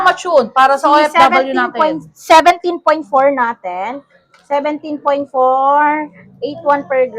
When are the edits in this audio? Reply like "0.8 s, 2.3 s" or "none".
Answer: none